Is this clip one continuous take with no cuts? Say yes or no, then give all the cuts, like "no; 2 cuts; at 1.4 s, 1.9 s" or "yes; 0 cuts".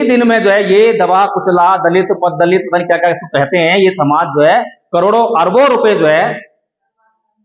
yes; 0 cuts